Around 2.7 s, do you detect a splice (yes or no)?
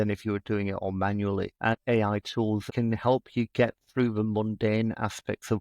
yes